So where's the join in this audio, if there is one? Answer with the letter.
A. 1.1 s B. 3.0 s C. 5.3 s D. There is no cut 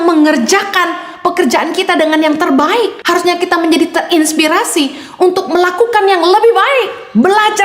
B